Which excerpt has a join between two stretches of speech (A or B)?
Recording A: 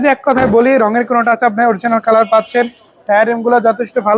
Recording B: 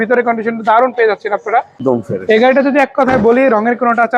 B